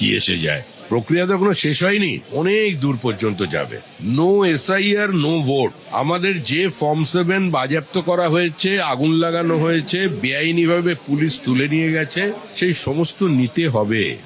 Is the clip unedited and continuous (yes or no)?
yes